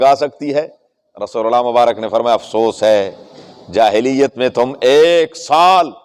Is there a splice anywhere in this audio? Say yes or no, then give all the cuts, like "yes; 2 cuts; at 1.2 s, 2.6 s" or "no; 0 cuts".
no; 0 cuts